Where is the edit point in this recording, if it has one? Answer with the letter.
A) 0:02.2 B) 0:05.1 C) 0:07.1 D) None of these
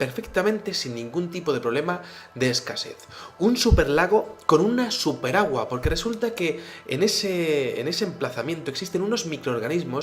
A